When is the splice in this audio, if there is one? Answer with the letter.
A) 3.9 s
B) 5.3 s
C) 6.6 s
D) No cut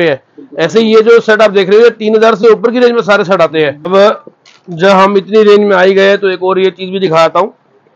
A